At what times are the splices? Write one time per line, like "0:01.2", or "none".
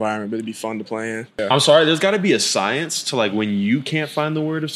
0:01.4